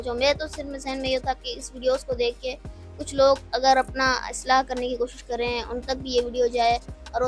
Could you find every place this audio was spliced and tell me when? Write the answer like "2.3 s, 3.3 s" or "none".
none